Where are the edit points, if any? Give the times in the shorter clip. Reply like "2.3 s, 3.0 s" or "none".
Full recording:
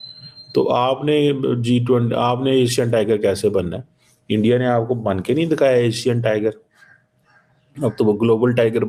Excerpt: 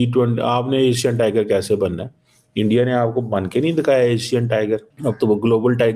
4.9 s